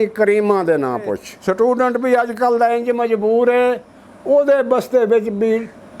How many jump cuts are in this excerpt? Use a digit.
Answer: 1